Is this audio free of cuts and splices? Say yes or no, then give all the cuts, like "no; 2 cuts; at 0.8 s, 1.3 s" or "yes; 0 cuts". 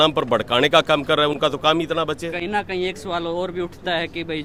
yes; 0 cuts